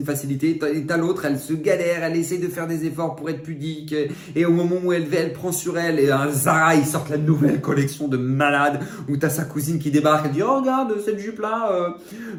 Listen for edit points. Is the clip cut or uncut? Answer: uncut